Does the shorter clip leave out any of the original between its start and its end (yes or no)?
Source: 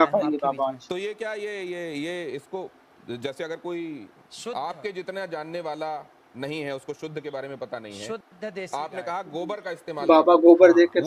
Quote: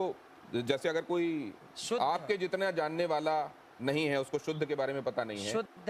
no